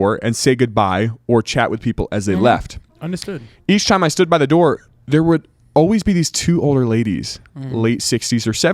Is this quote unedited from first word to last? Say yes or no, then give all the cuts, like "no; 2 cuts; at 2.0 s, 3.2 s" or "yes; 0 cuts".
yes; 0 cuts